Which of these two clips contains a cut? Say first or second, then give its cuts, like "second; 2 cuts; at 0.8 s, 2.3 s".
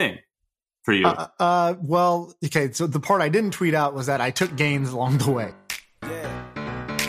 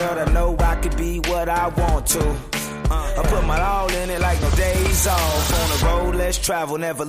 first; 1 cut; at 5.5 s